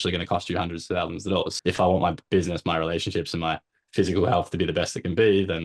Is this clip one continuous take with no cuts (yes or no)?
no